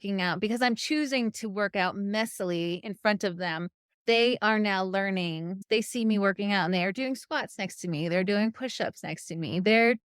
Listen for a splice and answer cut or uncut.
cut